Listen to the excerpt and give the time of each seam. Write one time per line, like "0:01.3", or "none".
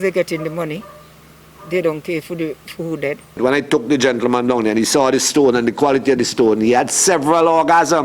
0:03.4